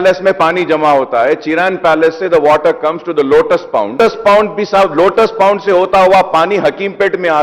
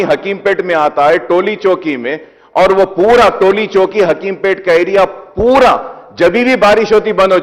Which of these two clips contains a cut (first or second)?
first